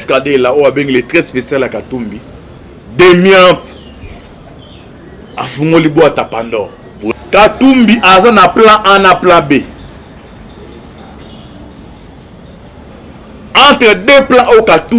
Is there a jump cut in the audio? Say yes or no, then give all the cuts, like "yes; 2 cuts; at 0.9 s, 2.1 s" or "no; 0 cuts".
yes; 1 cut; at 6.9 s